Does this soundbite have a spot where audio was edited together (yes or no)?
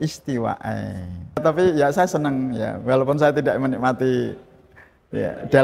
yes